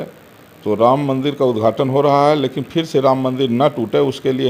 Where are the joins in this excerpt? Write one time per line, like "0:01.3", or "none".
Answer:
none